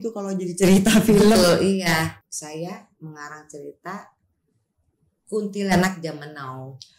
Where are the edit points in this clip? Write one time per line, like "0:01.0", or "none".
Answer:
0:02.2